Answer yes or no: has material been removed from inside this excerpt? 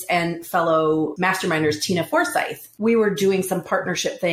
yes